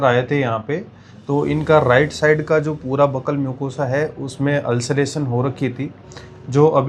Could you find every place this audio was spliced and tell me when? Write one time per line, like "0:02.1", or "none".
none